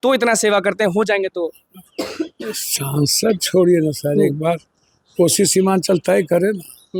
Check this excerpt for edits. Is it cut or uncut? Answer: uncut